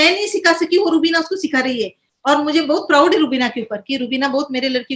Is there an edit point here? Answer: no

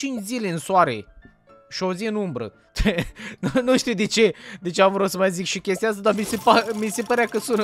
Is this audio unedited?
yes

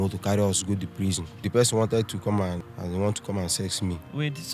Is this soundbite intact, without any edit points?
no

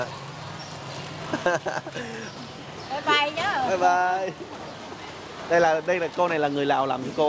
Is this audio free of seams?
yes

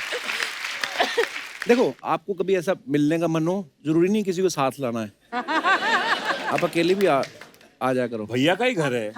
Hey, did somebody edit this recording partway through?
yes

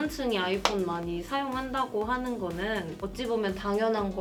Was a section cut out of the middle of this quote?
no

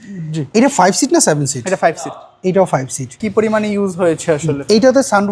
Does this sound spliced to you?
yes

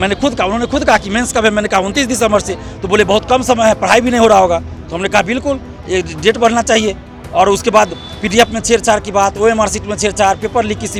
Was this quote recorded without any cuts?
yes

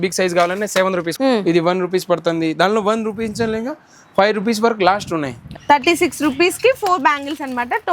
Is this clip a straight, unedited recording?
no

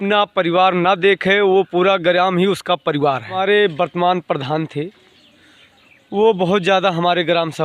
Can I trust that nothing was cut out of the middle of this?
no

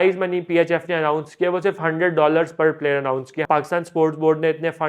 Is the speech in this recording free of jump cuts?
no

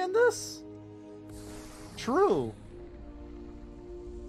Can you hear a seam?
no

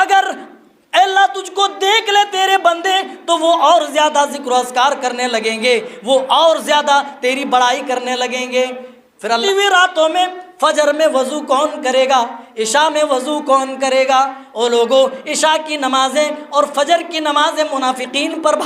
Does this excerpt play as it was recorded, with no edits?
no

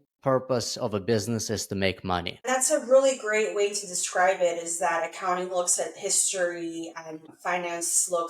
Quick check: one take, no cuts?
no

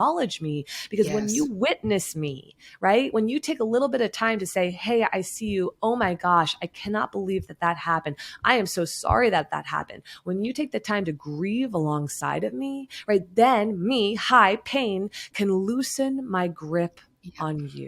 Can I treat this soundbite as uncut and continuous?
yes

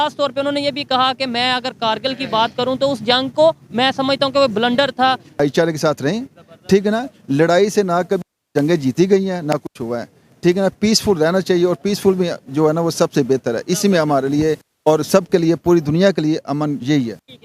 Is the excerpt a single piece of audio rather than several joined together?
no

